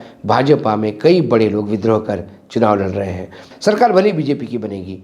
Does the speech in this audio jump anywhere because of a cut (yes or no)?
yes